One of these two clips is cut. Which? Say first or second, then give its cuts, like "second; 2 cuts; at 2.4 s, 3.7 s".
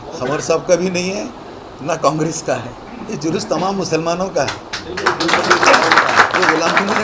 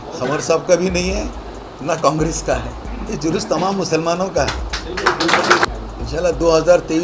second; 1 cut; at 5.7 s